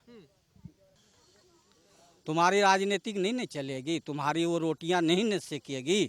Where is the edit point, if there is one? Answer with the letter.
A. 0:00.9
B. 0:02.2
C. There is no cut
A